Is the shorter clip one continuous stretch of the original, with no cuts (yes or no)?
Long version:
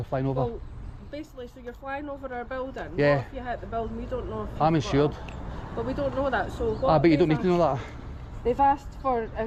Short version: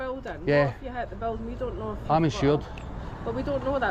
yes